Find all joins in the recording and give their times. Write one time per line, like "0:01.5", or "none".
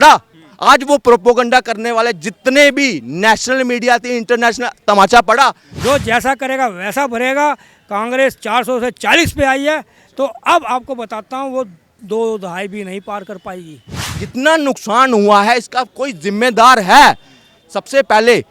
0:05.7
0:14.2